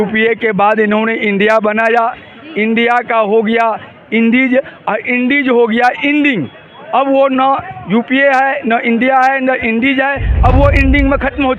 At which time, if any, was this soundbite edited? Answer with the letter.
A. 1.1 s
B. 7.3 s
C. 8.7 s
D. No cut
D